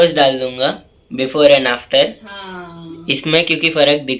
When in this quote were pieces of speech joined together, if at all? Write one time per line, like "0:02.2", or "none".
none

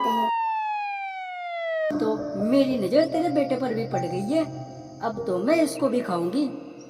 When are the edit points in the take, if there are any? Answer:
0:01.9

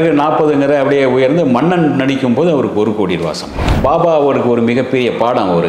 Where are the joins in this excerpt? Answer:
0:03.8

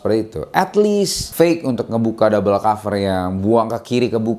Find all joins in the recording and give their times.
0:01.2

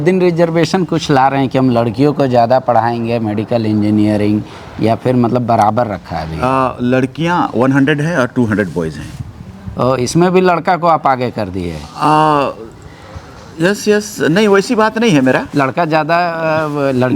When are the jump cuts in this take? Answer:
none

